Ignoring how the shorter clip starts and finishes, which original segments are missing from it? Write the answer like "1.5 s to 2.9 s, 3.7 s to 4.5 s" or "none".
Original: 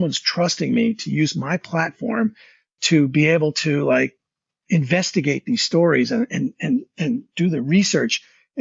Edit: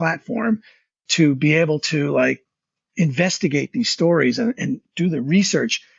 6.6 s to 7.3 s